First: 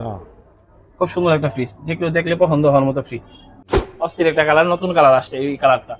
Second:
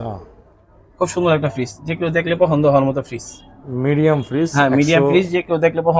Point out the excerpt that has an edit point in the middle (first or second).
first